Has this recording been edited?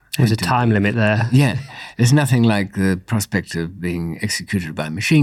no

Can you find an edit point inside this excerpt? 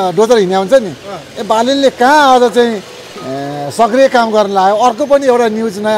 no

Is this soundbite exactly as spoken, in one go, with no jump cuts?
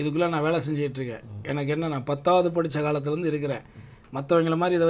yes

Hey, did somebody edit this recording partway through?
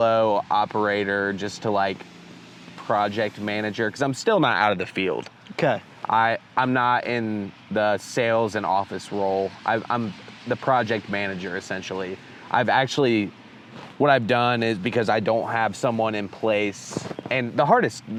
no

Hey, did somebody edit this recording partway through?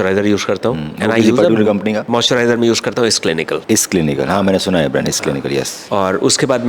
no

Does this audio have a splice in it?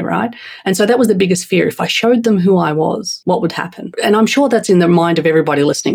yes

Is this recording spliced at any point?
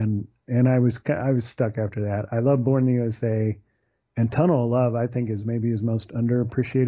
yes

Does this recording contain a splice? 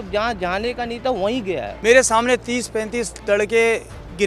yes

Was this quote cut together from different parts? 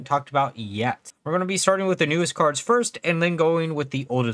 yes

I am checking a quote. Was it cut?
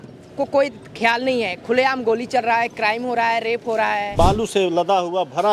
yes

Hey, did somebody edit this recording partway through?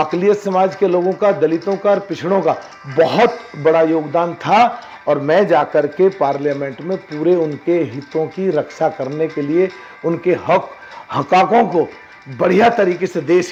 no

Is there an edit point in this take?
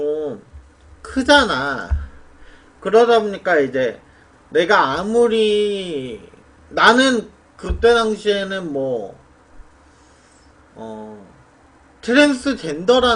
no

